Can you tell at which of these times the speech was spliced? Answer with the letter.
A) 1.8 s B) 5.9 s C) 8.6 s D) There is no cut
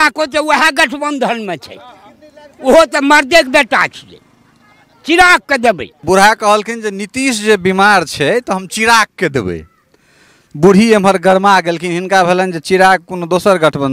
B